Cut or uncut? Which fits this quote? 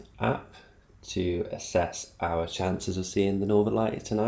uncut